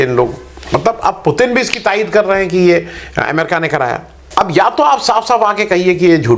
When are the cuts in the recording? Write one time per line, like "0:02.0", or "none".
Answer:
none